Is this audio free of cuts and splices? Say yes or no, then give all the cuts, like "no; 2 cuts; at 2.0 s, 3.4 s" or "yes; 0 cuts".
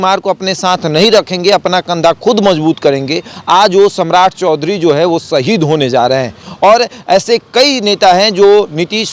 yes; 0 cuts